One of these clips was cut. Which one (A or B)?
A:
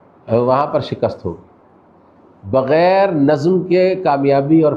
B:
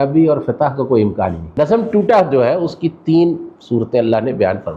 B